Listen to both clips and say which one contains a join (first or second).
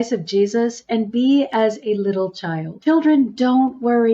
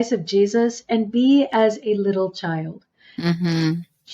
first